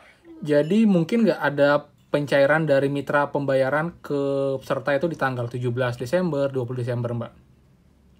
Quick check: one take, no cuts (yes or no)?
yes